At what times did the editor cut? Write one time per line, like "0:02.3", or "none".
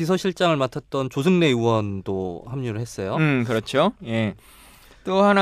none